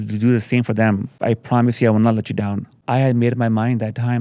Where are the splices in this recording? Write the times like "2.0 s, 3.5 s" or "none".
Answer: 1.1 s, 2.8 s

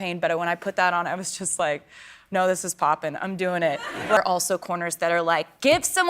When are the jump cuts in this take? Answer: 4.2 s

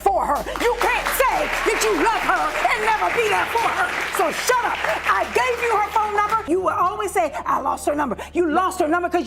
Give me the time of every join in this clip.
6.5 s

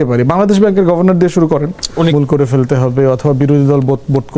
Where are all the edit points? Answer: 2.1 s

